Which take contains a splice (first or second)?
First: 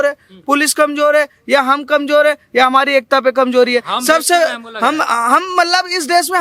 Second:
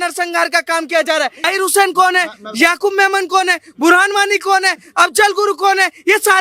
second